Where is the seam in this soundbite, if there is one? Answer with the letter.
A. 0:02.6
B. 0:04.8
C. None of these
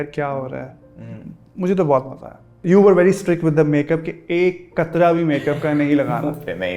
A